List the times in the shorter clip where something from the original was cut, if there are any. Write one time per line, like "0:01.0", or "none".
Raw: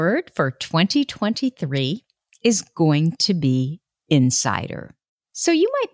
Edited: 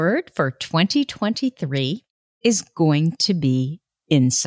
none